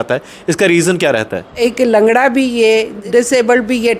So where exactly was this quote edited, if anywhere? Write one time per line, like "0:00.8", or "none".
0:01.6
0:03.0

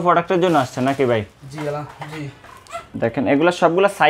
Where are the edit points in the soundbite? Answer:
0:02.8

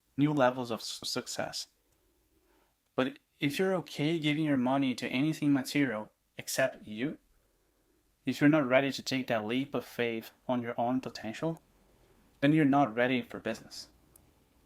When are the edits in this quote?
0:01.0

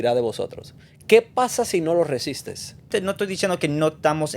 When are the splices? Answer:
0:02.9

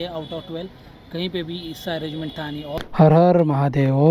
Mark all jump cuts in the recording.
0:02.7

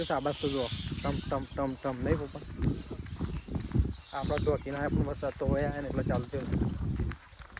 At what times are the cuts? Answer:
none

